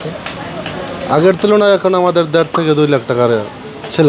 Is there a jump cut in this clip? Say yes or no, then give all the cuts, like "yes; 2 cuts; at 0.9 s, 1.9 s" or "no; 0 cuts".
no; 0 cuts